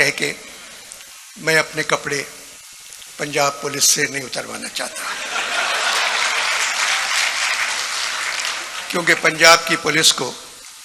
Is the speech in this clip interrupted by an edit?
no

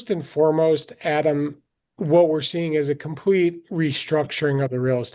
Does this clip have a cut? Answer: no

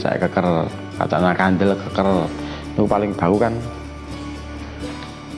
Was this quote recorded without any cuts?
yes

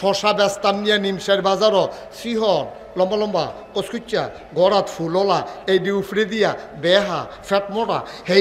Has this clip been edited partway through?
no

